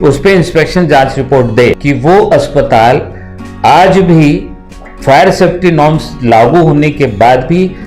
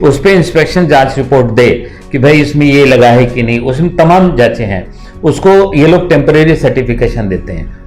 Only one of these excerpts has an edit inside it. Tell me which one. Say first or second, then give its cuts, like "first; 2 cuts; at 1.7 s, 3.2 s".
first; 1 cut; at 1.8 s